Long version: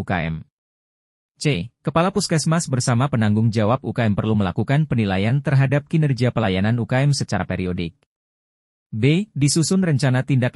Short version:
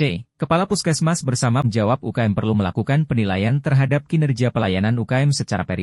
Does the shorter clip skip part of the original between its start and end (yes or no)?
yes